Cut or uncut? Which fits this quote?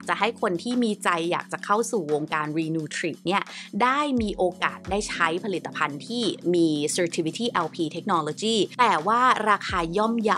uncut